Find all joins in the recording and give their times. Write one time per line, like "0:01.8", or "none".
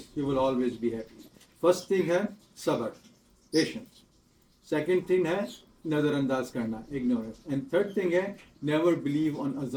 none